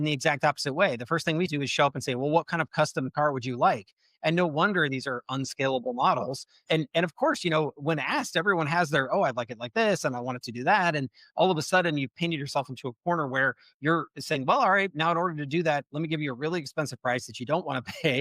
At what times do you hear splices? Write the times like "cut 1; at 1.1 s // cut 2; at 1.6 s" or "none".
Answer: cut 1; at 1.5 s // cut 2; at 6.6 s